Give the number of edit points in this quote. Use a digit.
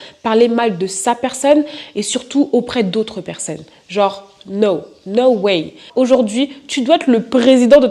1